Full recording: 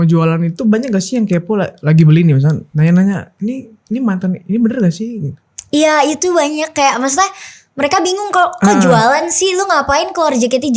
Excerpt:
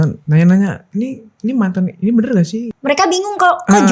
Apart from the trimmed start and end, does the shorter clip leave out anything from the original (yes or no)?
yes